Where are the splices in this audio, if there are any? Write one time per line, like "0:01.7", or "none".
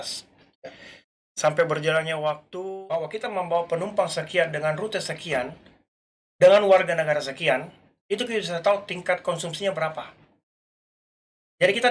0:02.5